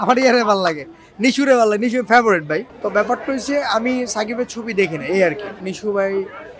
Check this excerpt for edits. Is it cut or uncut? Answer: cut